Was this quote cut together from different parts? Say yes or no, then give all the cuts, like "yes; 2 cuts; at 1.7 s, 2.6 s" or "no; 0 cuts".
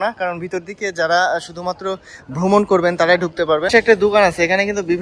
yes; 1 cut; at 3.7 s